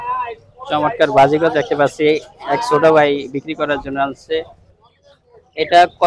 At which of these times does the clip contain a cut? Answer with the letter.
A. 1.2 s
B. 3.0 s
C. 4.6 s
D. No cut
D